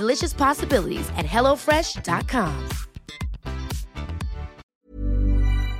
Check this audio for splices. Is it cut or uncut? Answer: cut